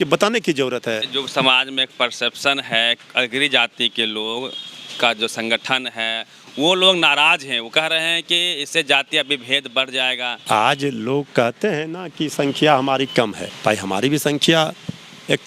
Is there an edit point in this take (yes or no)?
yes